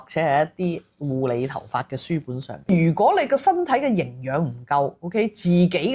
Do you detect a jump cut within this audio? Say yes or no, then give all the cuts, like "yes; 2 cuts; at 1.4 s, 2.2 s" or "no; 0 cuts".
yes; 1 cut; at 2.7 s